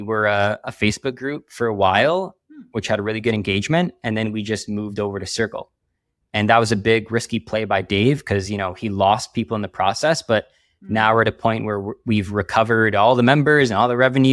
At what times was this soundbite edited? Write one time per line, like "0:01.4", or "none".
none

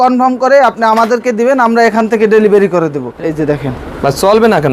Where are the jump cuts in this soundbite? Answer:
0:03.0

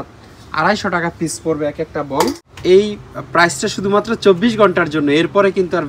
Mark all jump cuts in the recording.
0:02.4

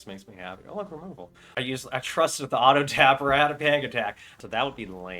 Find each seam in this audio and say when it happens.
0:01.6
0:04.3

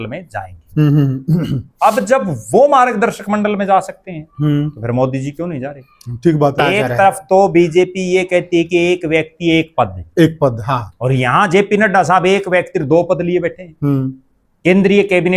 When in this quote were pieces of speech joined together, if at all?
0:06.6

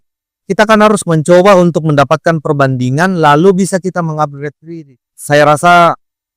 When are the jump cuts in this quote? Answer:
0:04.6

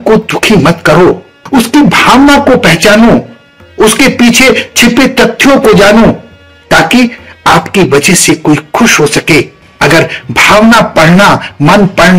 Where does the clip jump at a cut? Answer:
none

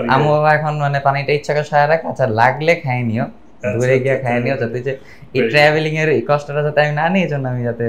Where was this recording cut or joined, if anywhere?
none

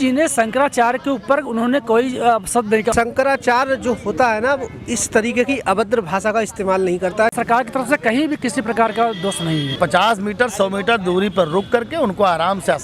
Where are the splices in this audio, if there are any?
0:02.9
0:07.3
0:09.7

